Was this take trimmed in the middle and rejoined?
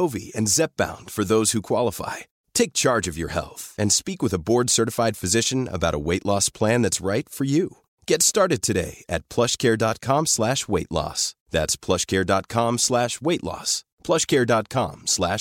no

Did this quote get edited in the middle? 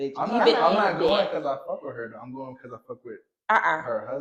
no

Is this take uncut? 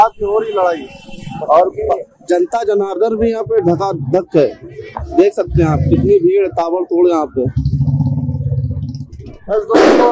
yes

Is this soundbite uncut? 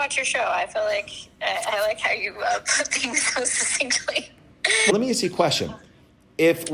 no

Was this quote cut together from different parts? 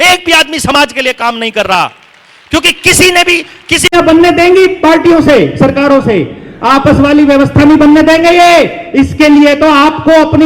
yes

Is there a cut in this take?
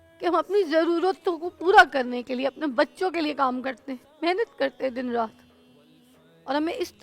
no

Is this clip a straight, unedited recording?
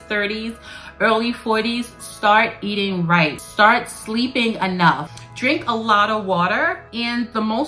no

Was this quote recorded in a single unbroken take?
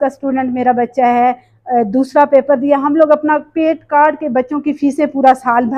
yes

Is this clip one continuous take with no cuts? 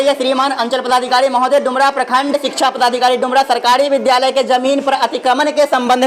yes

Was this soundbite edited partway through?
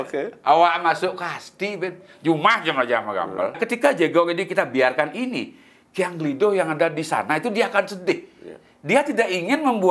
yes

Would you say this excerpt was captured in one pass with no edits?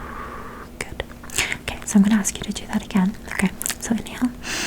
yes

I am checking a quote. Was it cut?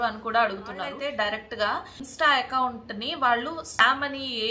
yes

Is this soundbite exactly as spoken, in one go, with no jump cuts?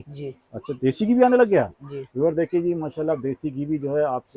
yes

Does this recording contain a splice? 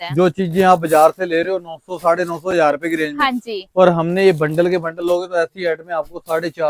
no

